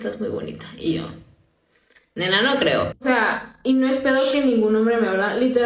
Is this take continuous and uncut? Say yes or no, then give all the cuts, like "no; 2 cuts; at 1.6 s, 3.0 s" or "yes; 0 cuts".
no; 1 cut; at 4.7 s